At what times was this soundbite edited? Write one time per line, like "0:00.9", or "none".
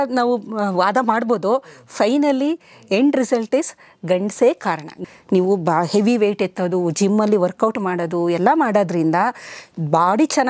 0:05.0